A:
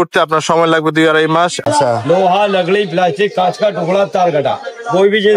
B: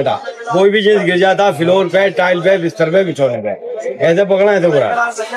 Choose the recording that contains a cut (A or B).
A